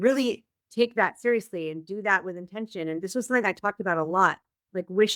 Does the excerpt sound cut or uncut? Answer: uncut